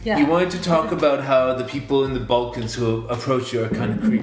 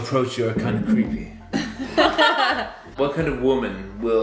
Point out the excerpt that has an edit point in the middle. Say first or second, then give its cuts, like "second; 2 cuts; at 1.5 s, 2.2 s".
second; 1 cut; at 2.9 s